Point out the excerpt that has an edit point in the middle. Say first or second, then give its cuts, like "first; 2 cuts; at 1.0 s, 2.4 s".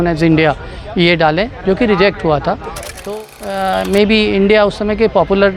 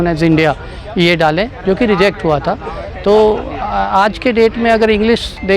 first; 1 cut; at 3.0 s